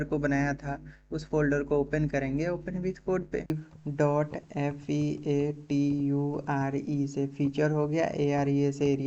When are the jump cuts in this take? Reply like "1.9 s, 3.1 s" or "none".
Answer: 3.4 s